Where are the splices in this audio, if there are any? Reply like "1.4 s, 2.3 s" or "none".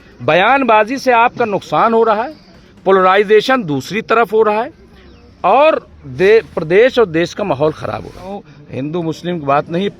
8.5 s